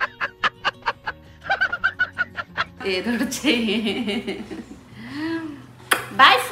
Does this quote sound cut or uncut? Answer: uncut